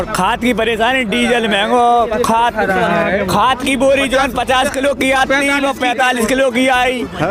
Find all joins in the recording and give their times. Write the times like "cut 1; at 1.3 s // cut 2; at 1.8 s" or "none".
none